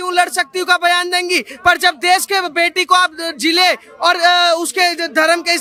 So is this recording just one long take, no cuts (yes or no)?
yes